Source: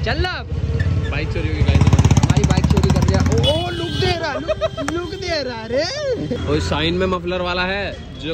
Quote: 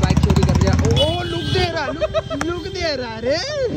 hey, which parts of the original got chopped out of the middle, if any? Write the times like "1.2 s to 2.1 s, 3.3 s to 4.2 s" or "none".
none

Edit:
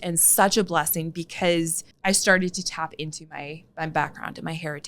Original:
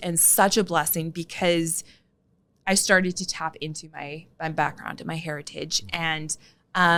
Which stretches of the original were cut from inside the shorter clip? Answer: 1.9 s to 2.5 s

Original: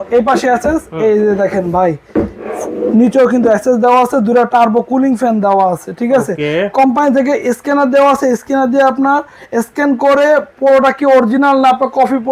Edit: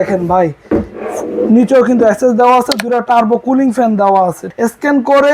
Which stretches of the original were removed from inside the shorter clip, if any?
5.9 s to 9.4 s

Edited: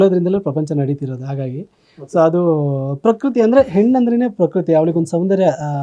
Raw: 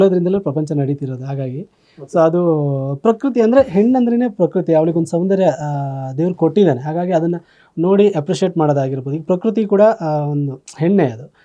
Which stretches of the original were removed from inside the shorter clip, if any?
none

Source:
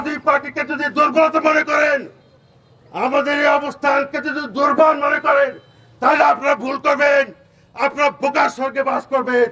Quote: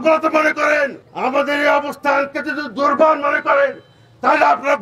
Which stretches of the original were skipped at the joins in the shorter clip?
2.2 s to 2.8 s

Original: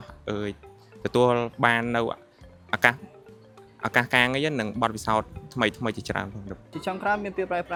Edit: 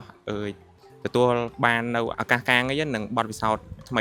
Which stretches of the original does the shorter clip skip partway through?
2.2 s to 3.8 s

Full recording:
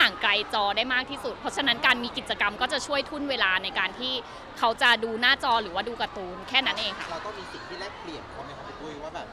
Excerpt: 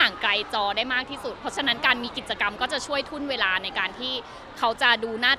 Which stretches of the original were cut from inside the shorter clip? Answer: none

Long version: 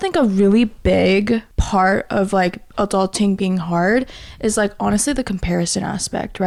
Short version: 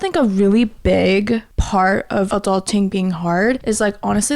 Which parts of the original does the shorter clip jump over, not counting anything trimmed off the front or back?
2.3 s to 2.7 s, 4.1 s to 4.4 s

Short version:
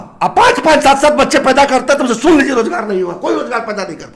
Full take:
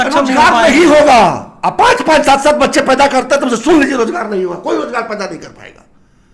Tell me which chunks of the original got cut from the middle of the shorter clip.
none

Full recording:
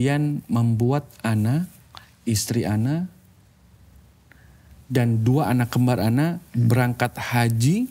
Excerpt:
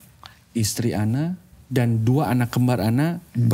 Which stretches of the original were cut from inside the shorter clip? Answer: 3.2 s to 4.7 s

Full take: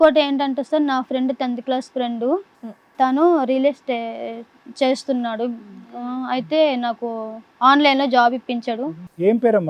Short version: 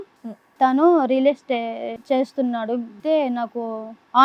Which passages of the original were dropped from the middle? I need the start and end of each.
4.3 s to 4.6 s, 5.7 s to 6.4 s

